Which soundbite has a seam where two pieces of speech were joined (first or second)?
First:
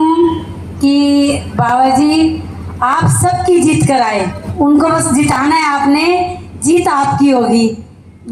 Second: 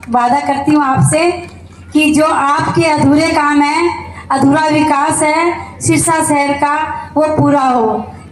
first